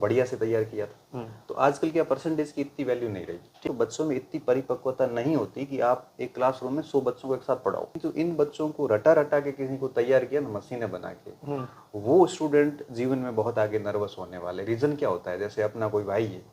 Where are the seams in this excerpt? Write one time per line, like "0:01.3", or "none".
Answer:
0:03.6
0:07.9